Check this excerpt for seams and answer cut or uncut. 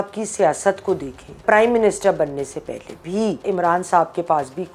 cut